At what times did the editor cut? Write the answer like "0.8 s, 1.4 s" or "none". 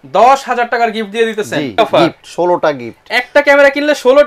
1.8 s